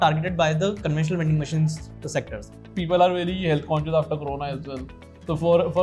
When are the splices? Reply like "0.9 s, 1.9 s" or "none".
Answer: 2.7 s